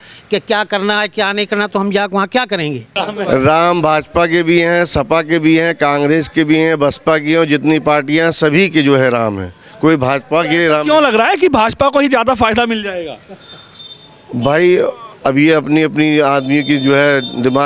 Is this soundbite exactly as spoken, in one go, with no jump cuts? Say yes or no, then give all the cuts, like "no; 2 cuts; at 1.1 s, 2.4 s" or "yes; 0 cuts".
no; 1 cut; at 2.9 s